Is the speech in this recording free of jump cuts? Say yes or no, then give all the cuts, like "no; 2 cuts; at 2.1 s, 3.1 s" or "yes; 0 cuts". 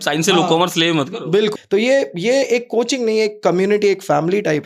no; 1 cut; at 1.5 s